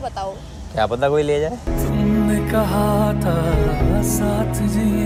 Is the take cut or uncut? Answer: uncut